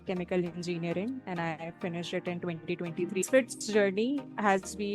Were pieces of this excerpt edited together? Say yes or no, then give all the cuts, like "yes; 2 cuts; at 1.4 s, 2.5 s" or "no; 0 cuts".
yes; 1 cut; at 3.3 s